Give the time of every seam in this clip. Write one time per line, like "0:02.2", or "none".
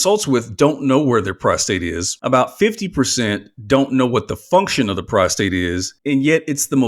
0:02.1
0:05.9